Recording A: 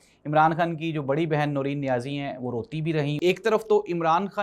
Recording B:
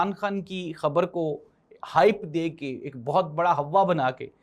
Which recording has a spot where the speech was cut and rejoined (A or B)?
A